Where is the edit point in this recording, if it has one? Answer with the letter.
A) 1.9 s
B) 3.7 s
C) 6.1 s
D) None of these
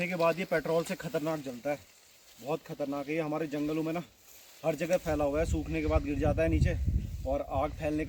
D